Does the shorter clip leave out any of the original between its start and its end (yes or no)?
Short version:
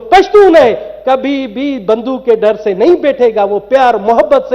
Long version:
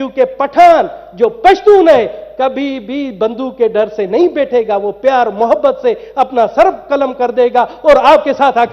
no